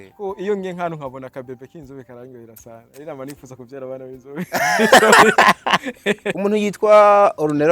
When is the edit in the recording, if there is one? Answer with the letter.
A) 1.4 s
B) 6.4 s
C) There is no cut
B